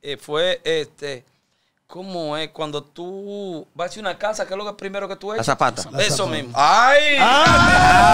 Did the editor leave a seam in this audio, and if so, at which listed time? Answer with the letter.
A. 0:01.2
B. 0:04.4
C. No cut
C